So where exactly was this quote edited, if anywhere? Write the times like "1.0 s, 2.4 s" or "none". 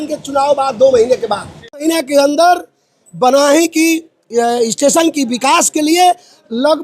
1.8 s